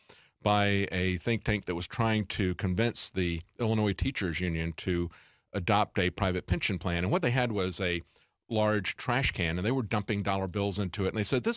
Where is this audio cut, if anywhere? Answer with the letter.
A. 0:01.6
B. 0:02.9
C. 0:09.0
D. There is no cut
D